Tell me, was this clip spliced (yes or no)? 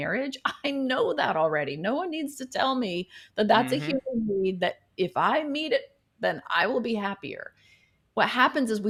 no